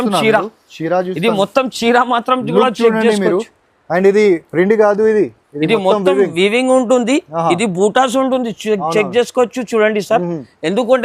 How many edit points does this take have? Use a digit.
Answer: 0